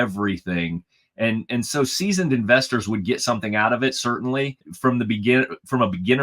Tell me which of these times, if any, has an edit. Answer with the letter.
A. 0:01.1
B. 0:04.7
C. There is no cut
B